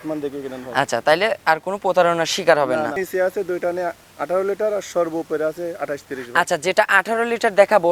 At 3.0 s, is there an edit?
yes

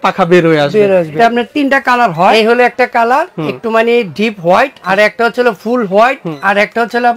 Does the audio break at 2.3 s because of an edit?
yes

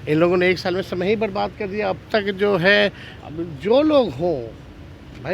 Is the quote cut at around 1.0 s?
no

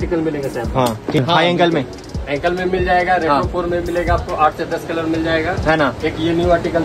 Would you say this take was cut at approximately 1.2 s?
yes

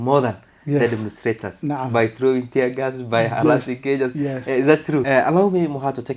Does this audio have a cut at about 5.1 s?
yes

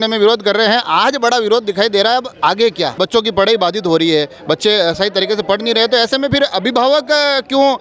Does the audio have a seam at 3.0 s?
yes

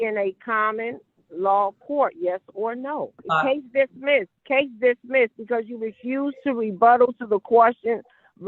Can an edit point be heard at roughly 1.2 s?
no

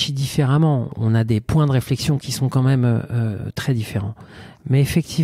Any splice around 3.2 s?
no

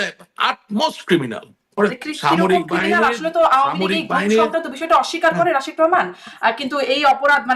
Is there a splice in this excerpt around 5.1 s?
no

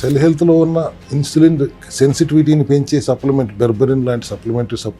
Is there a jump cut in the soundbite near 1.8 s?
no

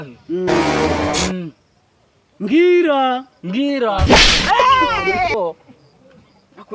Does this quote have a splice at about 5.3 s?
yes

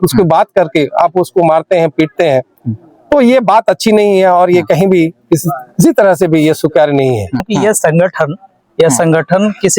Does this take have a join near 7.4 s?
yes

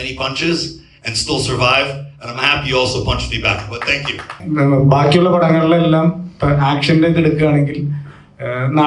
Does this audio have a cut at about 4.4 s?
yes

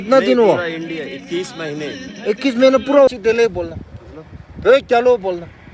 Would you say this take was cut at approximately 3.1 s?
yes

